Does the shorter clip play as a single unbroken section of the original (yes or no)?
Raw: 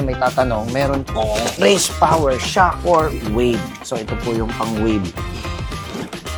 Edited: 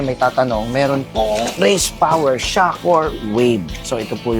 yes